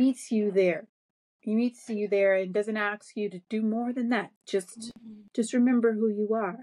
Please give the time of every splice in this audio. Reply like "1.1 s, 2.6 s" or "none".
none